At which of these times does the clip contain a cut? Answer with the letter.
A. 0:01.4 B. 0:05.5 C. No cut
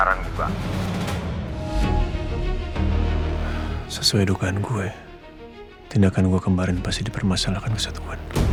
C